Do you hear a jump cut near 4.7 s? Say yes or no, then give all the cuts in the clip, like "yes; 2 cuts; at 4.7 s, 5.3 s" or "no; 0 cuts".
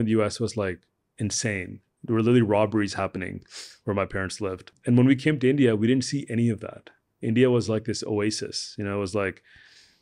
yes; 1 cut; at 4.7 s